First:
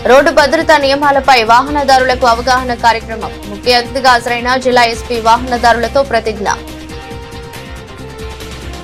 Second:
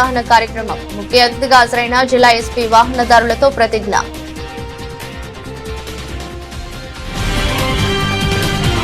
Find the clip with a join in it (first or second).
second